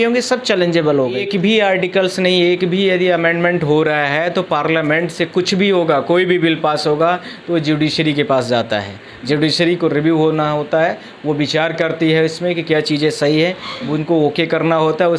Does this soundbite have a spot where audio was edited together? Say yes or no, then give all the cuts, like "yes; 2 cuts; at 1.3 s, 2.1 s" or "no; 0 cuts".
yes; 1 cut; at 1.2 s